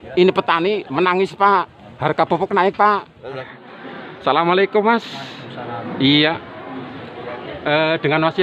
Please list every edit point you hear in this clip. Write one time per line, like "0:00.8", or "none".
0:03.5